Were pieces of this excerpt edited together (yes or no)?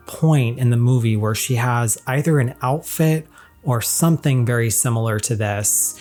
no